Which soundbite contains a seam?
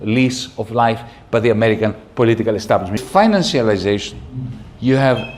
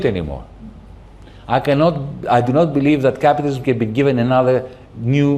first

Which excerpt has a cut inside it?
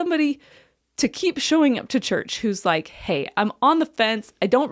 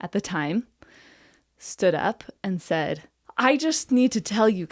second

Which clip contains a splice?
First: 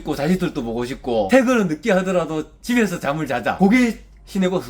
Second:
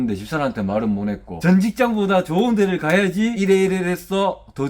second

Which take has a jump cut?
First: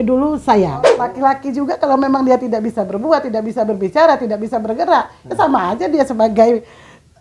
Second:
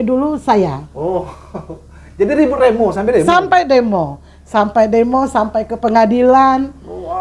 first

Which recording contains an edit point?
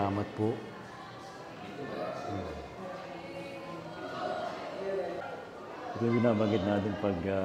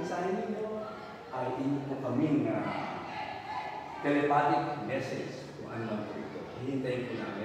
first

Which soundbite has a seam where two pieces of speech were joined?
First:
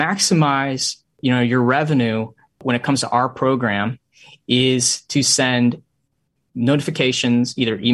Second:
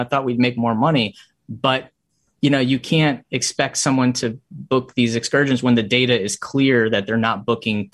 first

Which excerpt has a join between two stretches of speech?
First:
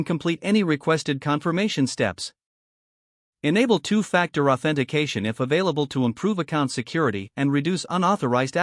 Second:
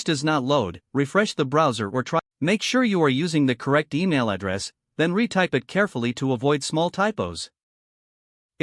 second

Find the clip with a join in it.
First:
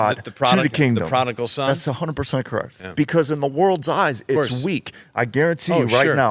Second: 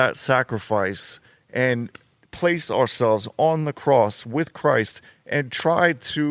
first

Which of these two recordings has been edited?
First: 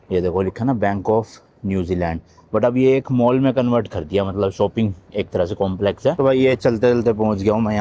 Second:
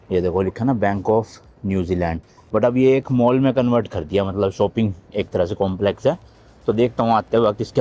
first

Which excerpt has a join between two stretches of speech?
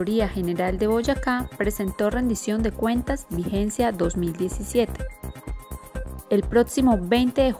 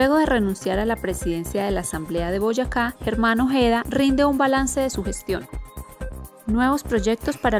first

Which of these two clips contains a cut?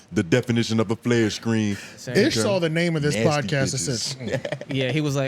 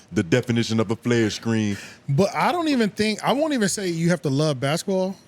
first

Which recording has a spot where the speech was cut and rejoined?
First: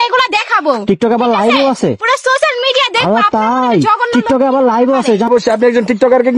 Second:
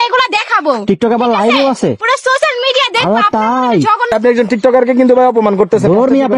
second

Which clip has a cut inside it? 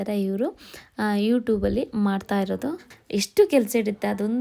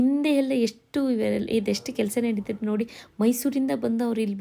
first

